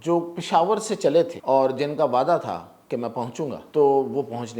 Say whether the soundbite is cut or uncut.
cut